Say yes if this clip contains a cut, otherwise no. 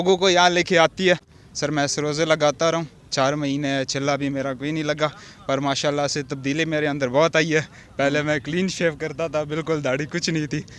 yes